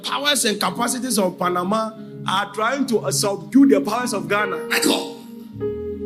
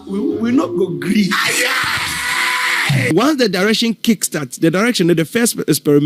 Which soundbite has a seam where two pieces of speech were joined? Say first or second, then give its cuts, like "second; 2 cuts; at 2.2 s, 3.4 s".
second; 1 cut; at 3.1 s